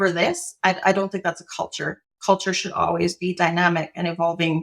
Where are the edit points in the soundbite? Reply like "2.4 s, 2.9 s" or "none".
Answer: 2.1 s